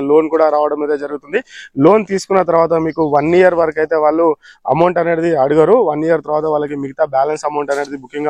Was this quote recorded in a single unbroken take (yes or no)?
yes